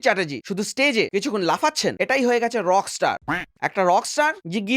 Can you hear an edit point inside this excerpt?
no; 0 cuts

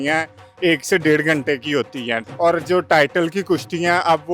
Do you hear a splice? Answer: yes; 1 cut; at 2.2 s

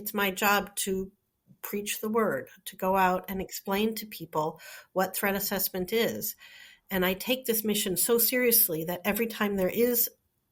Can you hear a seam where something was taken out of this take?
no; 0 cuts

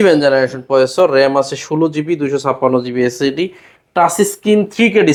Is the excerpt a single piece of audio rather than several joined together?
yes; 0 cuts

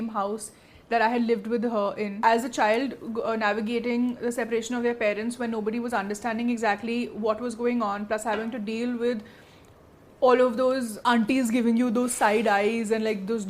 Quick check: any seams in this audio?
yes; 1 cut; at 2.1 s

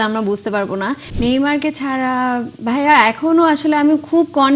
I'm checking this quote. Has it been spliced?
yes; 1 cut; at 1.1 s

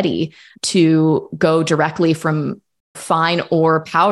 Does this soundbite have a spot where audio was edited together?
no; 0 cuts

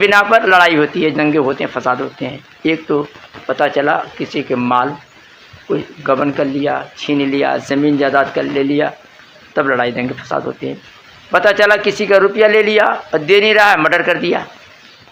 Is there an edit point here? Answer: no; 0 cuts

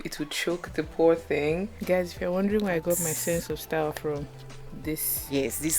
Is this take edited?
yes; 1 cut; at 1.7 s

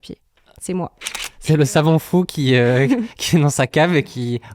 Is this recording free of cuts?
no; 1 cut; at 1.0 s

